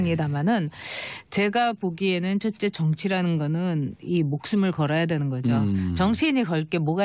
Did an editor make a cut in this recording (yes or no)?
yes